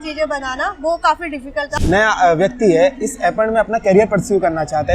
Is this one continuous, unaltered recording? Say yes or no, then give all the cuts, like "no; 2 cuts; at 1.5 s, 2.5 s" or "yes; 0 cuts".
no; 1 cut; at 1.7 s